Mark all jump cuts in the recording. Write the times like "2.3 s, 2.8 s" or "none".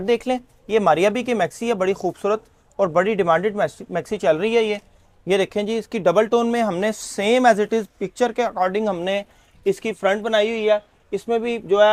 none